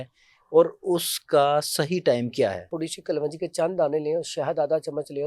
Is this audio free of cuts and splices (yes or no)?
no